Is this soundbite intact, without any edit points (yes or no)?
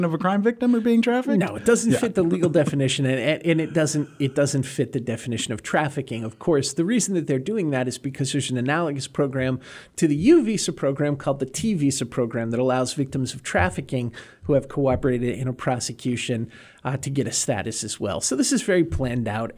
yes